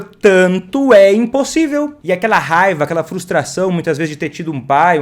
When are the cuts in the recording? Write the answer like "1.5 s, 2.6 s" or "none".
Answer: 2.0 s